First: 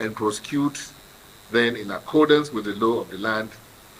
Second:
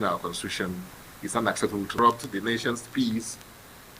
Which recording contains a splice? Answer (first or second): second